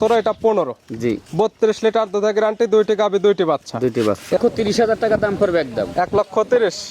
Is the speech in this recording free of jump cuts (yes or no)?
no